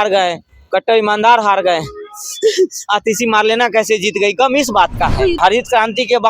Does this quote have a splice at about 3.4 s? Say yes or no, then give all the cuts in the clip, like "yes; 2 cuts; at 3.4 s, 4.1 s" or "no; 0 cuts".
no; 1 cut; at 5.4 s